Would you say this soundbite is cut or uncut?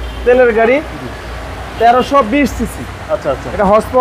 uncut